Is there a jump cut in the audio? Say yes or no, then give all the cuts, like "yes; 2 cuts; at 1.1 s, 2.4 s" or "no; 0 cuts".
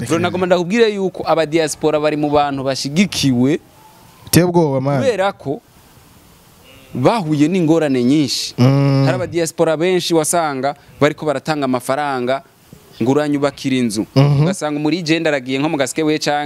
no; 0 cuts